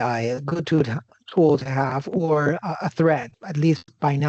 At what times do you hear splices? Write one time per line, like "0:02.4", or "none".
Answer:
0:03.4